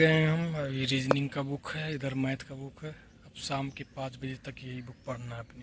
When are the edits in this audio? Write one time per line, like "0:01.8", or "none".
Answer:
none